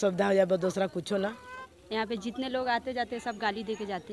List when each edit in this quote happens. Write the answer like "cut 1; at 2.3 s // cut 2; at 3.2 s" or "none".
cut 1; at 1.5 s